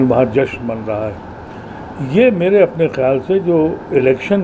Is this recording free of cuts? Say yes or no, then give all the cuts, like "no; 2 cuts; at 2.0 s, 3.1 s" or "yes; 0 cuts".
yes; 0 cuts